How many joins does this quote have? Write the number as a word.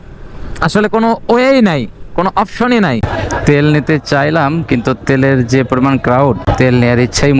one